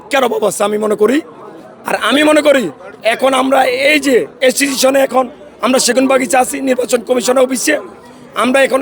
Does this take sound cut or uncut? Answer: uncut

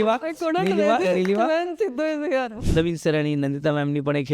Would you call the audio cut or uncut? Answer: cut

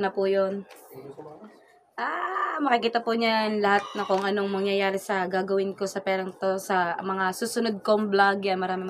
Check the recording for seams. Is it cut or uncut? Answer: uncut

